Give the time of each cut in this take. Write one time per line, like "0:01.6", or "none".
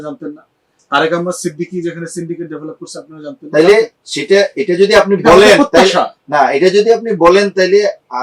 none